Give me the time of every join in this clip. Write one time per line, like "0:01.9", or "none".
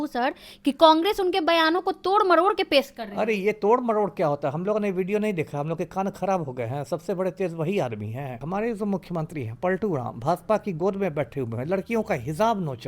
0:08.4